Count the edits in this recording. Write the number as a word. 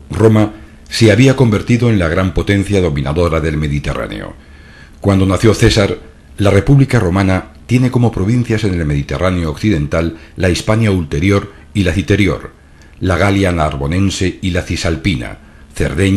zero